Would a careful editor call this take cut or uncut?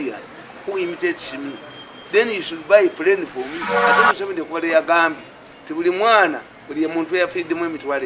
cut